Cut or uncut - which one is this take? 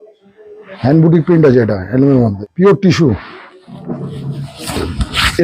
cut